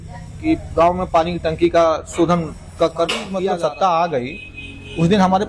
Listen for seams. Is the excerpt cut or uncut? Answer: cut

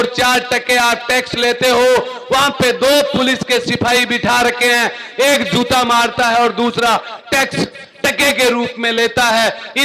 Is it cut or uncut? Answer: uncut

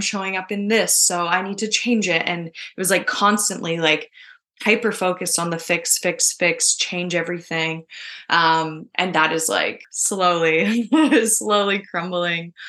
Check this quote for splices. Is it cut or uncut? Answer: cut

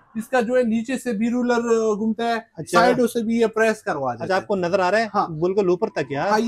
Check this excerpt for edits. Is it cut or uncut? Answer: uncut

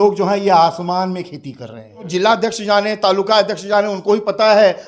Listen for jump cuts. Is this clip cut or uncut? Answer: cut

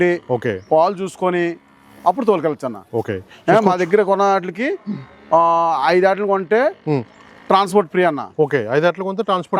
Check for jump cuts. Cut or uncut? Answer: uncut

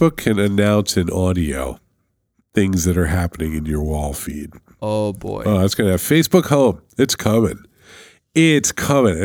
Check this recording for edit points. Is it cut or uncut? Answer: uncut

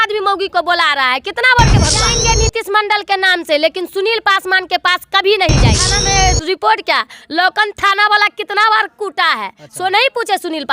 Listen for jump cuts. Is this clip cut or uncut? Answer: cut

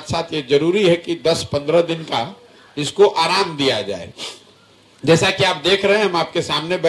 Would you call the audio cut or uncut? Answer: uncut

